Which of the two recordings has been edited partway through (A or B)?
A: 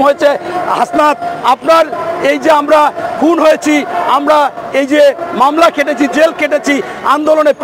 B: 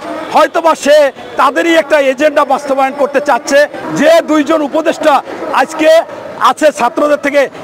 B